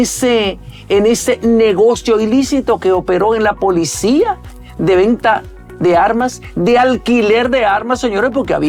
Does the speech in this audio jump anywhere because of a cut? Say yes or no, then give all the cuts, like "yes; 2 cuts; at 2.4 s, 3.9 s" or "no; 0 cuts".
no; 0 cuts